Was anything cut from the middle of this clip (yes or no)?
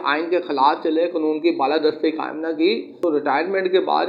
no